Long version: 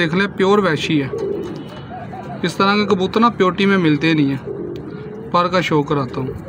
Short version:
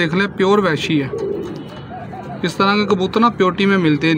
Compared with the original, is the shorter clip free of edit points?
yes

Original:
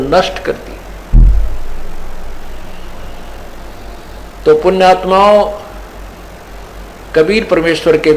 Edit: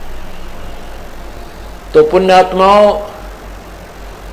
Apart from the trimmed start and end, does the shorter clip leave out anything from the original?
yes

